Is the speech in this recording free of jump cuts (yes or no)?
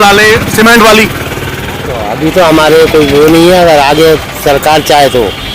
yes